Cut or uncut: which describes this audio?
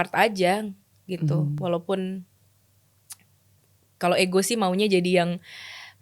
uncut